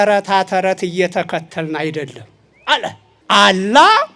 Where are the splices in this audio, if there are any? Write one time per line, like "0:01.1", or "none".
0:03.1